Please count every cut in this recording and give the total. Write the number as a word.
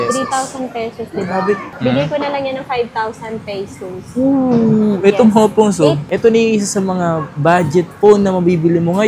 two